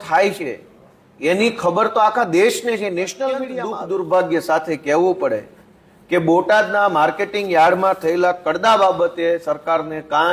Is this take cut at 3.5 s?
yes; 1 cut; at 3.5 s

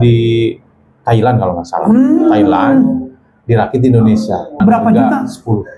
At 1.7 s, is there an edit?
no; 1 cut; at 4.6 s

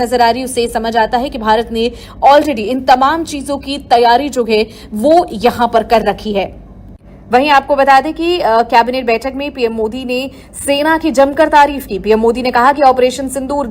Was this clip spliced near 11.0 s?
no; 1 cut; at 8.4 s

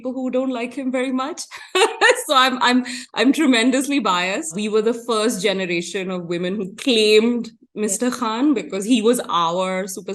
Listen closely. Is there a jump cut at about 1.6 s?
no; 1 cut; at 4.5 s

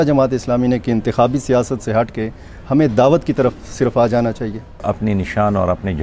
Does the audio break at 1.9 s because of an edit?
no; 1 cut; at 4.8 s

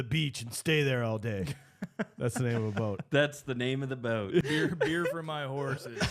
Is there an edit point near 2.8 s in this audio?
no; 1 cut; at 4.4 s

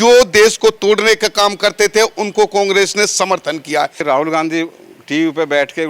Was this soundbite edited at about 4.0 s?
yes; 1 cut; at 4.0 s

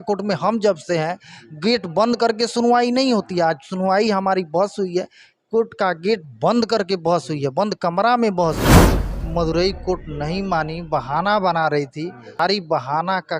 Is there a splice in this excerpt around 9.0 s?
yes; 2 cuts; at 9.0 s, 12.4 s

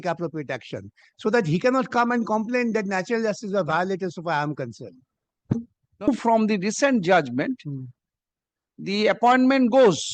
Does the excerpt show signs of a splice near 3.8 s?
no; 1 cut; at 6.1 s

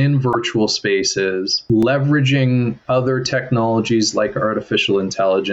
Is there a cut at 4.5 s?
no; 1 cut; at 1.6 s

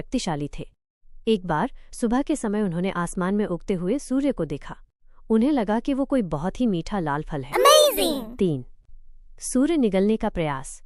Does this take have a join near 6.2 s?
no; 2 cuts; at 7.4 s, 8.1 s

